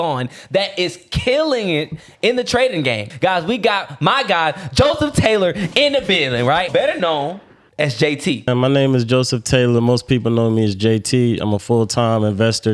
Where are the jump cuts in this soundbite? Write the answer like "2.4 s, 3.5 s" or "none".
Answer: 3.1 s, 6.7 s, 8.5 s